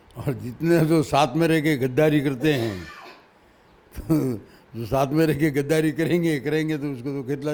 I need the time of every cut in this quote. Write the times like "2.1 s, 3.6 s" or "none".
none